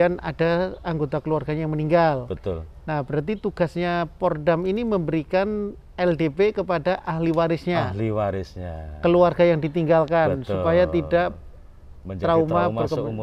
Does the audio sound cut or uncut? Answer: uncut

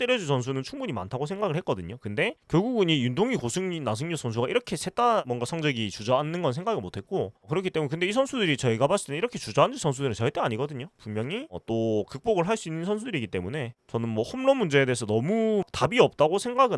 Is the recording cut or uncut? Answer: cut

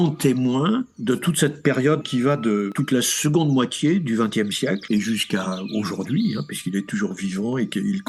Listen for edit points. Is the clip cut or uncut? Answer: uncut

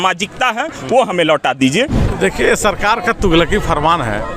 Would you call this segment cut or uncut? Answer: cut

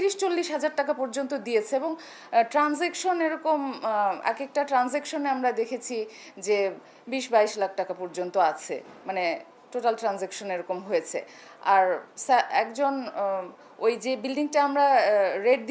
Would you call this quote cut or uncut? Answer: uncut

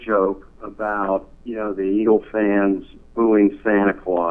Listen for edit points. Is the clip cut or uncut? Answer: uncut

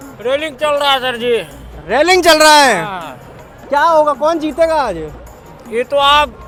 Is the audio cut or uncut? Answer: uncut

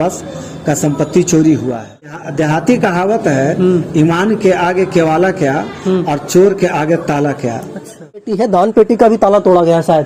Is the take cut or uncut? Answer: cut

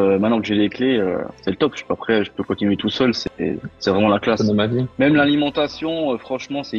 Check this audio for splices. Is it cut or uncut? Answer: cut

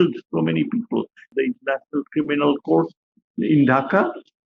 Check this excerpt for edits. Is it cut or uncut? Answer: cut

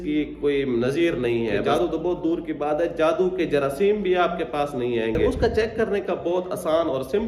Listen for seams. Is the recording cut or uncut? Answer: cut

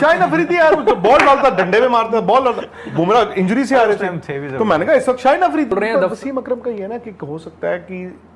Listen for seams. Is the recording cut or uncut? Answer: cut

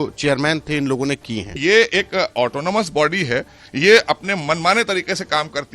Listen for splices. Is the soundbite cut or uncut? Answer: cut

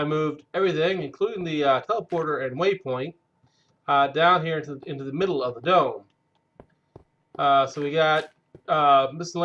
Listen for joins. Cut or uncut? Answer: cut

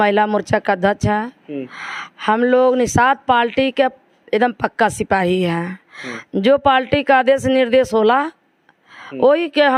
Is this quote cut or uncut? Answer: uncut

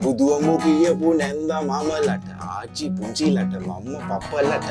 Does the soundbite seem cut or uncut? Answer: uncut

